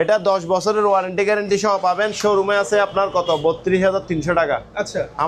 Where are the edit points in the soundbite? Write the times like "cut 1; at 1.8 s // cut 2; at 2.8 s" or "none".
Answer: none